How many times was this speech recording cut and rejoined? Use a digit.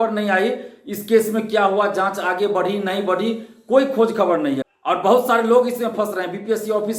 1